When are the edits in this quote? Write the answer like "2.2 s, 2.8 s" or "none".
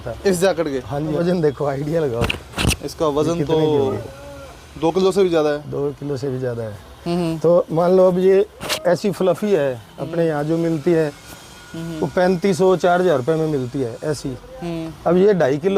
1.2 s